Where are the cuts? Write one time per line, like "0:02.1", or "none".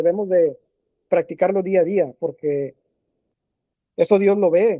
none